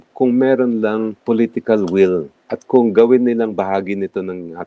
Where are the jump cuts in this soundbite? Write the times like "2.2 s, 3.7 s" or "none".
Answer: 1.1 s